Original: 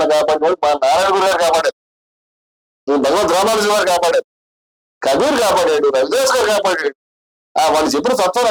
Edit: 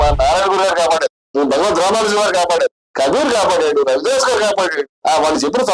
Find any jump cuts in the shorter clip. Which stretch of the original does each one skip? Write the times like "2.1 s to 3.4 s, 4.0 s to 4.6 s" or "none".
1.8 s to 2.7 s, 4.4 s to 4.9 s, 6.9 s to 7.4 s